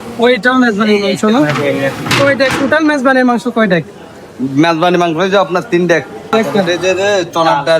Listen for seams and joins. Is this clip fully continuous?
no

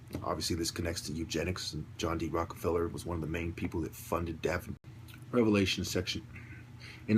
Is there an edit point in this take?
no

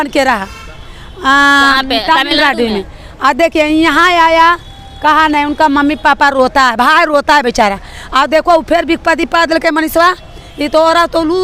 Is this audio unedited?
yes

